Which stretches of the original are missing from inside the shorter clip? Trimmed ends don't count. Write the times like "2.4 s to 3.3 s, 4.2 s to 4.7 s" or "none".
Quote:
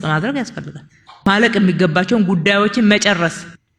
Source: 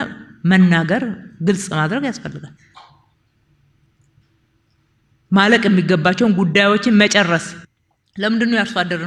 2.9 s to 5.4 s